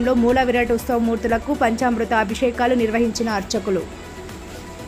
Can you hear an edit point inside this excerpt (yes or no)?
no